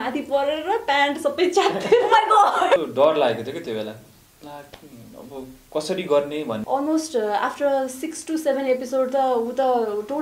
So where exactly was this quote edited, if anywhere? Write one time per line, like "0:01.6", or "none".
0:02.8
0:06.6